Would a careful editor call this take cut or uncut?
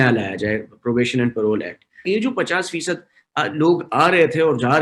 cut